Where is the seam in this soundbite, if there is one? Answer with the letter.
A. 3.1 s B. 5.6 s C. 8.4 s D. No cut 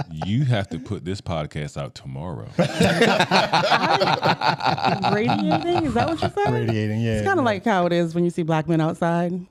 D